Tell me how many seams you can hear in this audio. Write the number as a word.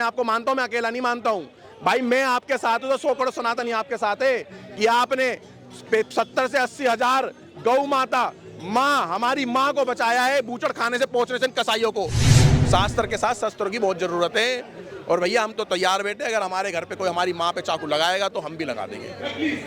one